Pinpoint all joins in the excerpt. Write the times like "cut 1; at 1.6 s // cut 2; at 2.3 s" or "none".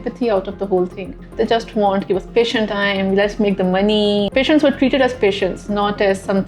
cut 1; at 1.3 s // cut 2; at 4.3 s